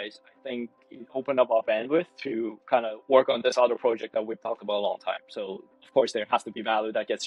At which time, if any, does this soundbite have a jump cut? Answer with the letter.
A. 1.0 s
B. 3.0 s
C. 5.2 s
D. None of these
D